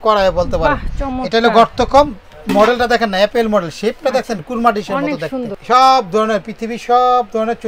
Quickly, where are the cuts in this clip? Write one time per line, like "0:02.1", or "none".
0:05.5